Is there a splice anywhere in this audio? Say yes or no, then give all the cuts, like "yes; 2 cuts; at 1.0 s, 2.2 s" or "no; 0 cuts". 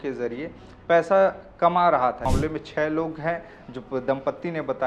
yes; 1 cut; at 2.3 s